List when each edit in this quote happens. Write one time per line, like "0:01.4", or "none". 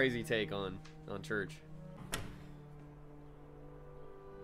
0:02.0